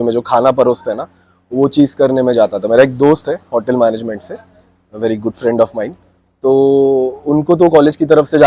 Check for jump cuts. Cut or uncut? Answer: uncut